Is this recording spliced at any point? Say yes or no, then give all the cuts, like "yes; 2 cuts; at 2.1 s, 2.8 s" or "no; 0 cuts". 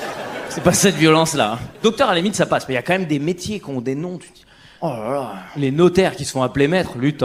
no; 0 cuts